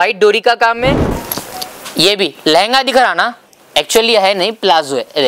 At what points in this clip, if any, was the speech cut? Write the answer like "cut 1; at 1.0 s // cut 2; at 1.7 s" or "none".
cut 1; at 1.1 s